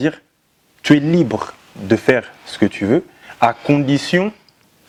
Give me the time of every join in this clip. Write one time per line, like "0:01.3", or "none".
none